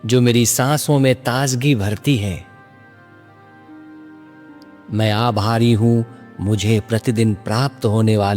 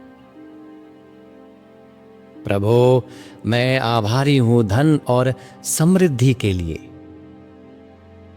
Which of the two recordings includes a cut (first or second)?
first